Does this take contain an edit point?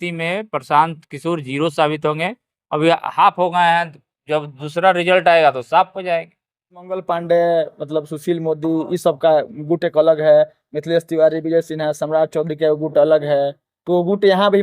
yes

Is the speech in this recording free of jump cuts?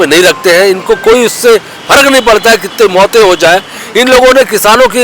yes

